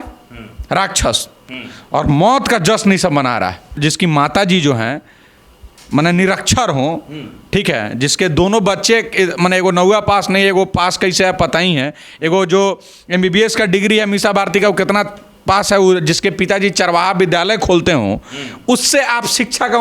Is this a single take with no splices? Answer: no; 1 cut; at 3.7 s

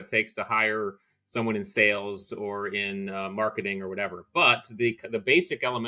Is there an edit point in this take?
no; 0 cuts

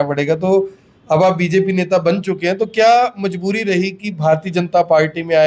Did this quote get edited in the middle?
no; 0 cuts

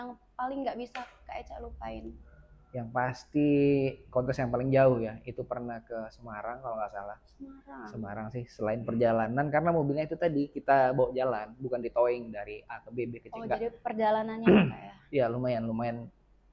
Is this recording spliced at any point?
no; 0 cuts

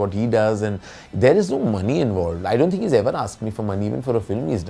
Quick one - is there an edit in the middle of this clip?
no; 0 cuts

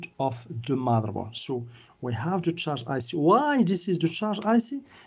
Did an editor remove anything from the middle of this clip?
no; 0 cuts

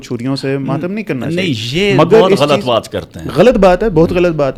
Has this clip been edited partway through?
no; 0 cuts

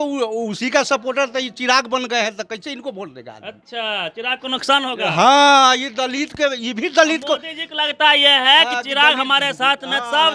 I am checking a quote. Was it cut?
no; 0 cuts

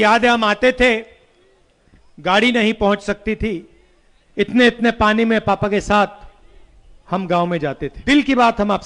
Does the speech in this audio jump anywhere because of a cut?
yes; 1 cut; at 8.0 s

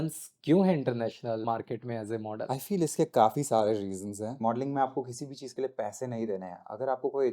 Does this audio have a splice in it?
yes; 3 cuts; at 1.4 s, 2.5 s, 4.3 s

